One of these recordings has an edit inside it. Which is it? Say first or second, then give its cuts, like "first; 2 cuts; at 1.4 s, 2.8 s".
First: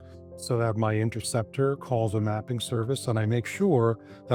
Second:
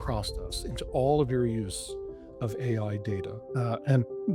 second; 1 cut; at 3.4 s